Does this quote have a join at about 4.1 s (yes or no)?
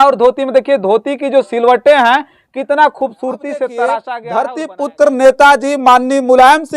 yes